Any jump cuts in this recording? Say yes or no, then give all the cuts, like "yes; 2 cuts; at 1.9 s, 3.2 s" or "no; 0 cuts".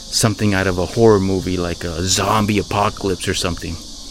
no; 0 cuts